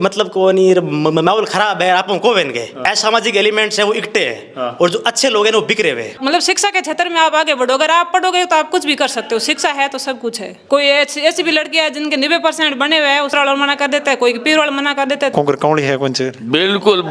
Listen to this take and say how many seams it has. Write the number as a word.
five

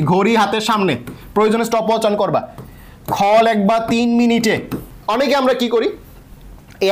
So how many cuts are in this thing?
one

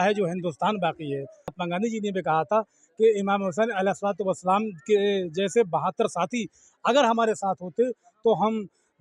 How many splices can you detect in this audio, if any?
one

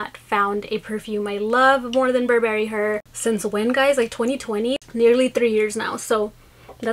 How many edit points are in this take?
two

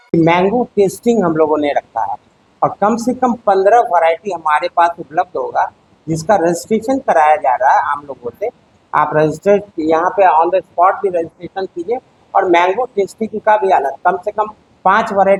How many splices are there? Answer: zero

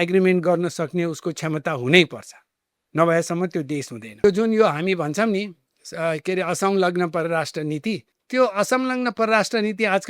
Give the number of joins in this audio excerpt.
two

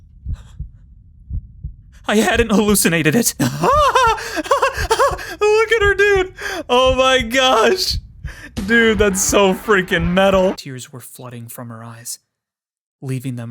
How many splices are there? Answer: two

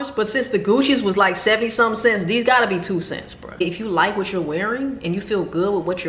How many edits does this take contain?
one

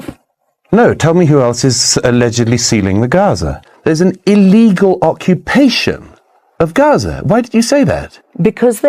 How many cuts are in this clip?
one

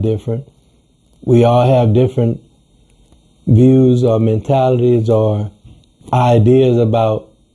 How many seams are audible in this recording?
one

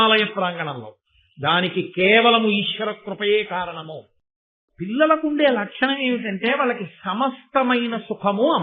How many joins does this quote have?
one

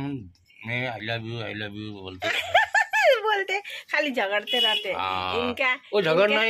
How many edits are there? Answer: zero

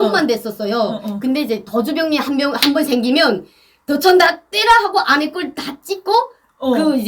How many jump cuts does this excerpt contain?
zero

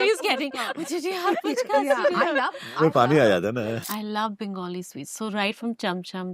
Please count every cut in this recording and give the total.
one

